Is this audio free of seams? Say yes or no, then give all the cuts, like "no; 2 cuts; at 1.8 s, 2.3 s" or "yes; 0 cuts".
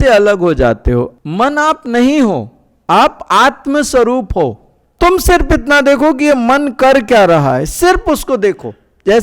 no; 2 cuts; at 1.2 s, 4.8 s